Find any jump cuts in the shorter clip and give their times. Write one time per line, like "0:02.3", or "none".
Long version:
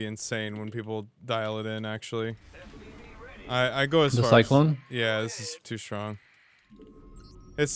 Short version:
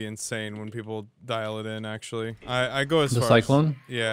0:02.4